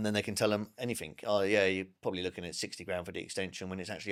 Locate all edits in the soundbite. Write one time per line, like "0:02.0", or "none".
none